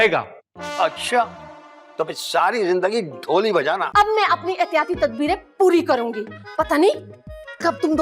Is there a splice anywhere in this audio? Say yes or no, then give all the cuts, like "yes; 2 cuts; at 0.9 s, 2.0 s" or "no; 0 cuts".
yes; 1 cut; at 3.9 s